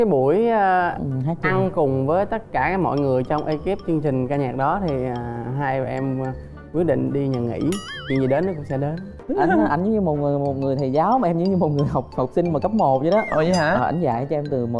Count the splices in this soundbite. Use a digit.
1